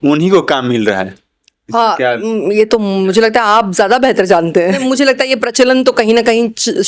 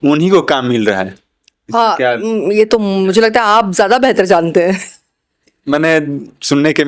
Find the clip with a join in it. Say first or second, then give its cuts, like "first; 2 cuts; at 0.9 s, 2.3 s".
first; 1 cut; at 4.8 s